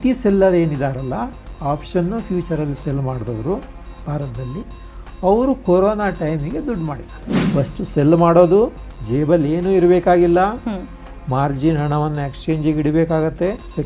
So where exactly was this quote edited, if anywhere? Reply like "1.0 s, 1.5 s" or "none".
7.4 s